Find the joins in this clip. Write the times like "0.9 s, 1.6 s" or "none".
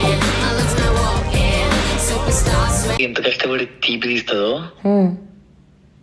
3.0 s